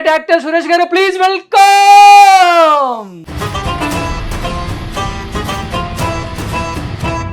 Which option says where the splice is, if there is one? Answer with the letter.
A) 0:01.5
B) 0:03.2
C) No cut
B